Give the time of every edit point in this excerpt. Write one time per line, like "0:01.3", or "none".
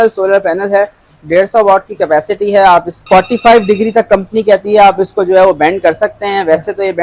0:02.9